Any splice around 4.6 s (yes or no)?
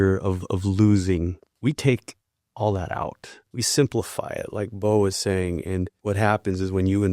no